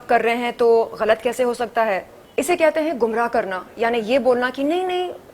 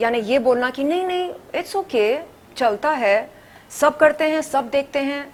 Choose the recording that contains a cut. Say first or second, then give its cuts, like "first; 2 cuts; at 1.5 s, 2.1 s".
first; 1 cut; at 2.2 s